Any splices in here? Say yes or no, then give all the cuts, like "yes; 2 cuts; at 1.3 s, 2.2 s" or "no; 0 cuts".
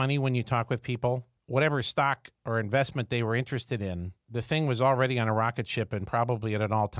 yes; 3 cuts; at 1.3 s, 2.3 s, 4.2 s